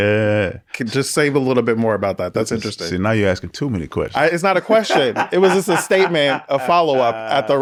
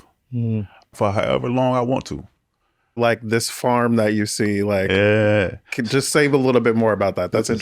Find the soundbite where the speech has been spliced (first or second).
second